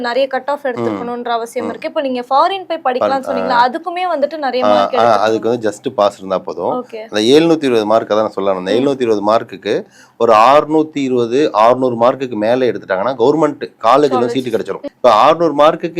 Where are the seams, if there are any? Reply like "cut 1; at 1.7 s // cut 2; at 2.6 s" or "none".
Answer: cut 1; at 14.8 s